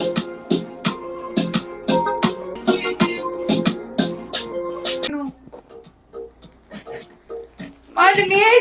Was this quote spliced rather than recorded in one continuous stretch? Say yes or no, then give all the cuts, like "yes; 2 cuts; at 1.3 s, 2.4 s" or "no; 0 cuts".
no; 0 cuts